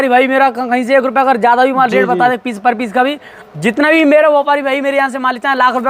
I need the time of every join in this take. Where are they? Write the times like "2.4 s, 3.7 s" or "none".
none